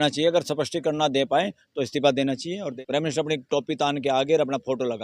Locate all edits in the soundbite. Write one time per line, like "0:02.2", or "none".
0:02.7